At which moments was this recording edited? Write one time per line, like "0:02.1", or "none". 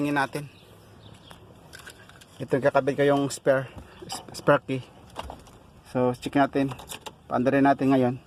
none